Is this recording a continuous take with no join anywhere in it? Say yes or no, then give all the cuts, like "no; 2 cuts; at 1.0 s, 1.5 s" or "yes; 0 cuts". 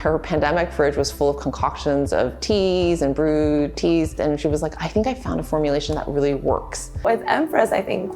no; 1 cut; at 7.0 s